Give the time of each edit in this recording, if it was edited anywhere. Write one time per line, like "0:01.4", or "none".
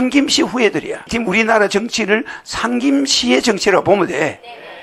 none